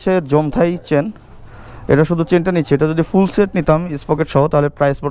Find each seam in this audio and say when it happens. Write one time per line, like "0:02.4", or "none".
none

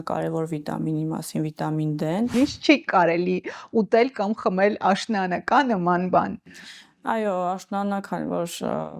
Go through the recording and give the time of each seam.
0:02.3

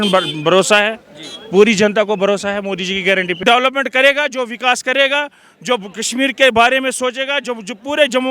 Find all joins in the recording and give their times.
0:03.4

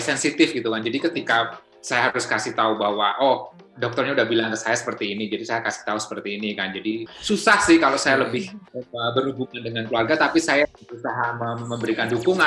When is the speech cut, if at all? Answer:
0:07.0

